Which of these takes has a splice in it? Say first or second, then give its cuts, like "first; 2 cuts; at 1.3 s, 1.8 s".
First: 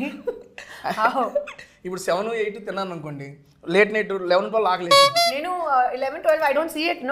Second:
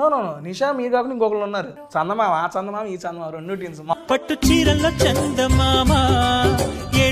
second; 2 cuts; at 1.8 s, 3.9 s